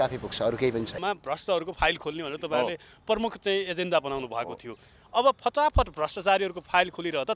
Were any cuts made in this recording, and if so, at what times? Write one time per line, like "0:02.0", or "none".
0:00.9